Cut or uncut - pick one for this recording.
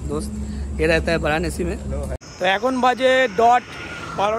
cut